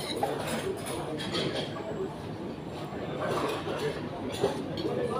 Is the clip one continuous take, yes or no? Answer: yes